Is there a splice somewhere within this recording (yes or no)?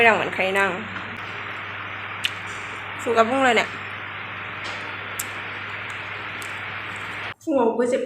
yes